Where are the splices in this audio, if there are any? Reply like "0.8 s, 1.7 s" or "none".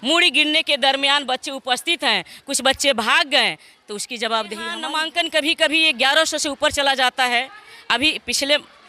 4.8 s